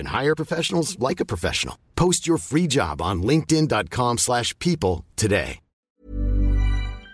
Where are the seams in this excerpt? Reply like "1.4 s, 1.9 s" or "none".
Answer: 5.8 s